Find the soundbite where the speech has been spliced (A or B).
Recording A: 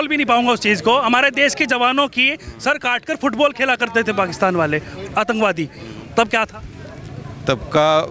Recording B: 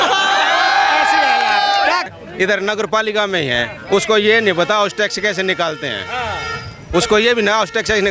B